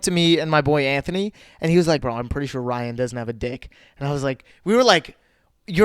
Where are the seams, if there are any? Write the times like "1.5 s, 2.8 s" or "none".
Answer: 2.0 s